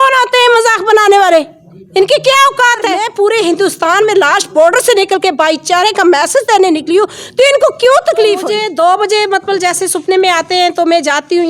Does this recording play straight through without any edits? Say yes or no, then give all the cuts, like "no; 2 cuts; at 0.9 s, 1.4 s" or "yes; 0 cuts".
no; 2 cuts; at 3.1 s, 8.6 s